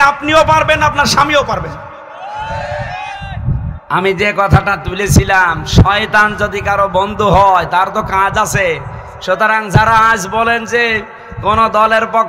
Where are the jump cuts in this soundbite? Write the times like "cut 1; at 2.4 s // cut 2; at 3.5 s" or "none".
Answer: cut 1; at 3.7 s